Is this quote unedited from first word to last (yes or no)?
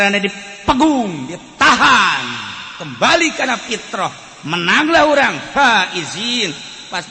yes